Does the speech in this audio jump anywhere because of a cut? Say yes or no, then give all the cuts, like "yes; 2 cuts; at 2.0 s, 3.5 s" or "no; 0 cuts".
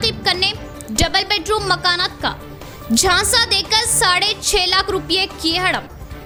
no; 0 cuts